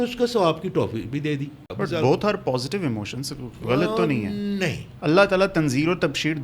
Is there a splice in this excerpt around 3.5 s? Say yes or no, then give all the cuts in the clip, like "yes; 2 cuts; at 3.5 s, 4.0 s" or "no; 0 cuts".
no; 1 cut; at 1.6 s